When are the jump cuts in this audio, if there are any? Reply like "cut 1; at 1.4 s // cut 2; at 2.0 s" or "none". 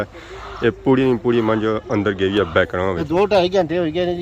cut 1; at 3.0 s